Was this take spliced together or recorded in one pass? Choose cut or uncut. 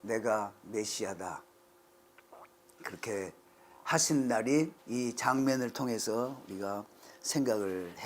cut